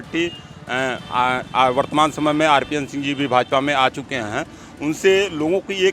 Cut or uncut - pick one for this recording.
uncut